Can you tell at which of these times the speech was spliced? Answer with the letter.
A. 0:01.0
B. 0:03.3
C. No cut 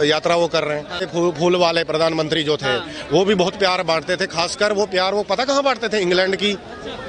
A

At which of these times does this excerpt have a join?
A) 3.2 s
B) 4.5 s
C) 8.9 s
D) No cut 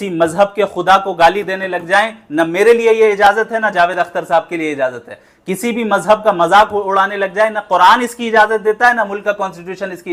D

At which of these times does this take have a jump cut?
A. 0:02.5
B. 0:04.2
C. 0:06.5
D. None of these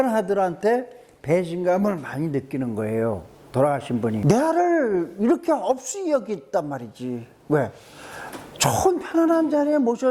B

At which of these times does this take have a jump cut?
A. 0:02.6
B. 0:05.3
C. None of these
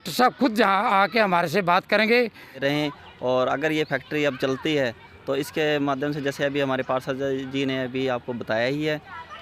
A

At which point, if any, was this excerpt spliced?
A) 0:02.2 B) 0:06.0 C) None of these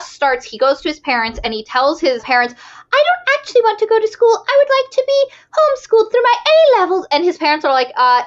A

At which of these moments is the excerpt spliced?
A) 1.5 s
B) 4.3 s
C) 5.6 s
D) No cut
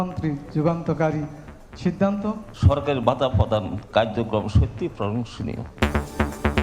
C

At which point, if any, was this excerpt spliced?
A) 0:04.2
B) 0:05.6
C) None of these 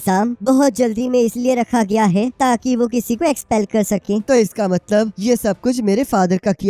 A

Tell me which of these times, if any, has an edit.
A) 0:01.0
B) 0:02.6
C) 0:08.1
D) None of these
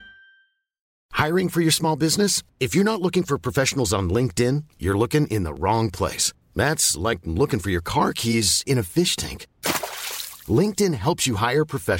A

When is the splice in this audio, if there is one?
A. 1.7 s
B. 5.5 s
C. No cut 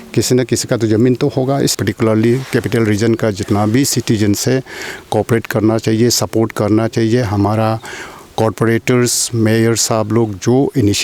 A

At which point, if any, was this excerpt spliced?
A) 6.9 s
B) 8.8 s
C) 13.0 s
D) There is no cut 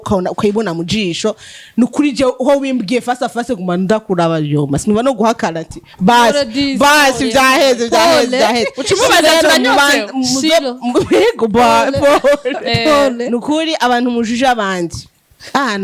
D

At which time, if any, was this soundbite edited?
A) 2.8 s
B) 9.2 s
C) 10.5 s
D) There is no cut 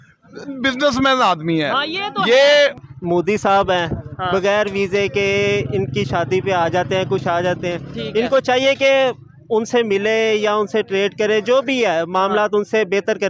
A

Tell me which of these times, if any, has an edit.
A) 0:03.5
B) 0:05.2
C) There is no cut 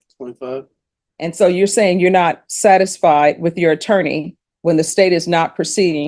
C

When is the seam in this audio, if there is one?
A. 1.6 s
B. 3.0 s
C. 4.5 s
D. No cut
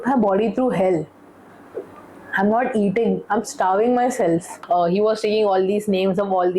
C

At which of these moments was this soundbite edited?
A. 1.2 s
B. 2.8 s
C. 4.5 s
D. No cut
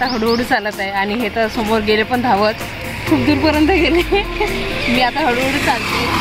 D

